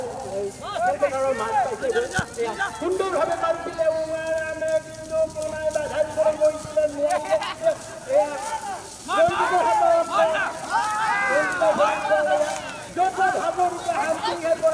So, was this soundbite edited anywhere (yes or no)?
no